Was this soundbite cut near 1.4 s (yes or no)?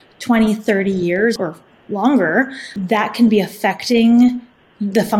yes